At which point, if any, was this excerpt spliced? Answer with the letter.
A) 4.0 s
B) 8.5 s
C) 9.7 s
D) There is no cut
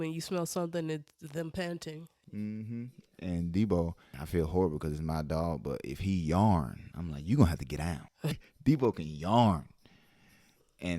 B